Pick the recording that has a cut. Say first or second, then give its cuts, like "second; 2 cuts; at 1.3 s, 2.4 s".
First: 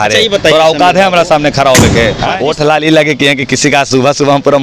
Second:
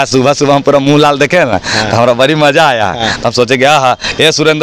first; 1 cut; at 2.3 s